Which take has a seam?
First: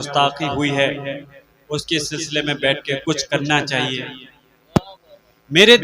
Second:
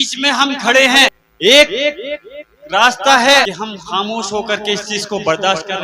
second; 2 cuts; at 1.2 s, 3.5 s

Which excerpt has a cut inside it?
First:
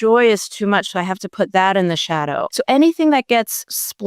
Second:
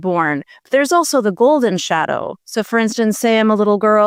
first; 1 cut; at 2.5 s

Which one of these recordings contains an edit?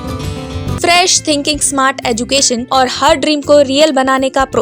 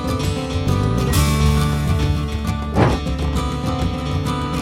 first; 2 cuts; at 0.8 s, 2.6 s

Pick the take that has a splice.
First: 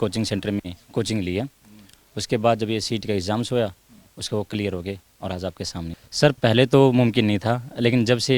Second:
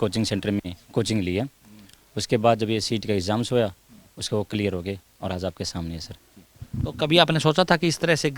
first; 1 cut; at 6.0 s

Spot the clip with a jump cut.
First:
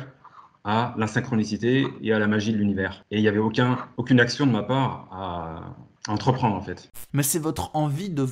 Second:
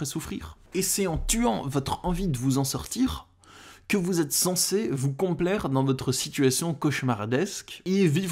first; 1 cut; at 7.0 s

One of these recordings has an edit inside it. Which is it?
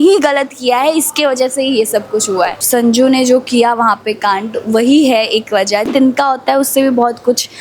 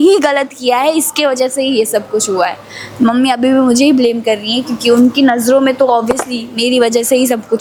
first; 2 cuts; at 2.6 s, 5.9 s

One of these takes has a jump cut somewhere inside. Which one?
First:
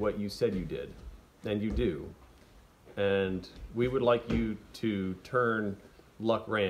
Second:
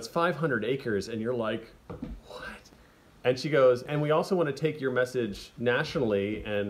second; 3 cuts; at 2.6 s, 3.9 s, 5.4 s

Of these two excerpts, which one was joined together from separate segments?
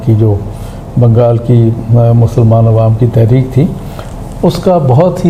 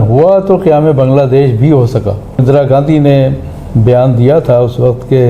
second; 1 cut; at 2.4 s

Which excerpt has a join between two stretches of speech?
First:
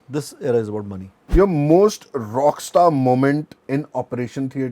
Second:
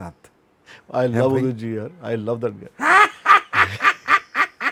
first; 2 cuts; at 1.3 s, 3.6 s

